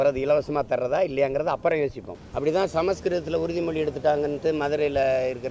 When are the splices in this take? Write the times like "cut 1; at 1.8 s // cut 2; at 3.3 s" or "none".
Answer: cut 1; at 2.1 s